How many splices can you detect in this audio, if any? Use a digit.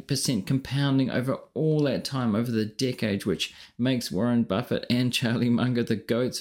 0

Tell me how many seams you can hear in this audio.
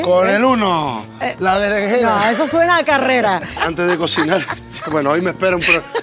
1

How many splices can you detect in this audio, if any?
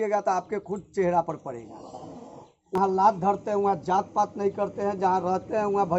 1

